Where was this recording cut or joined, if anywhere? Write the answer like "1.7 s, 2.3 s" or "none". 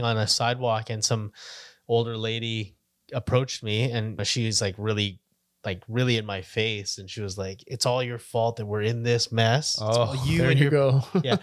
4.2 s